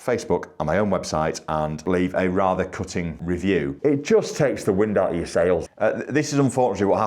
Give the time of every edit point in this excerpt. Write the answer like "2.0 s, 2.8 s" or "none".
1.8 s, 3.4 s, 5.6 s